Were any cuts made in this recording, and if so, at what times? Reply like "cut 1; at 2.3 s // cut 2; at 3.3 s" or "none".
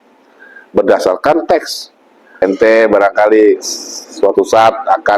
cut 1; at 2.4 s